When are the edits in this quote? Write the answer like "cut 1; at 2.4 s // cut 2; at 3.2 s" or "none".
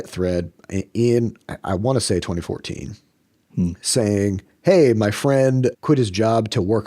cut 1; at 5.8 s